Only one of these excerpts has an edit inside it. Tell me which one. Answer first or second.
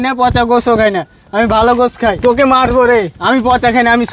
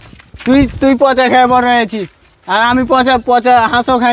first